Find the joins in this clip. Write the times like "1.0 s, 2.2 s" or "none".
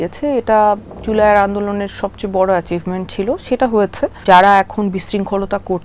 4.2 s